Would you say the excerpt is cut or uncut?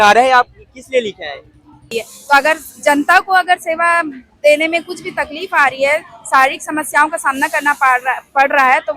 cut